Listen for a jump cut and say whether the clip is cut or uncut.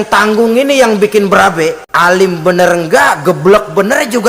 cut